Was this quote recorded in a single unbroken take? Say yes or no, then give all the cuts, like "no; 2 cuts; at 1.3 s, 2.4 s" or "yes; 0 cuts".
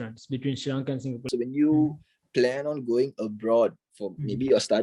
no; 1 cut; at 1.3 s